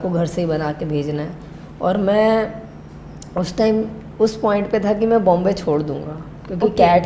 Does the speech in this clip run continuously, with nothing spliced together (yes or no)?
yes